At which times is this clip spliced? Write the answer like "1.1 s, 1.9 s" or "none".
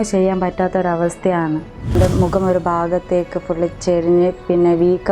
2.0 s